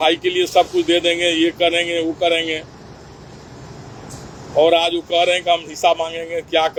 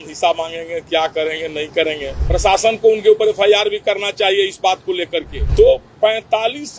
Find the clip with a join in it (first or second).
second